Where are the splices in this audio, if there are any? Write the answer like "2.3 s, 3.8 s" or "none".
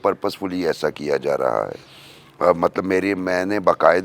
none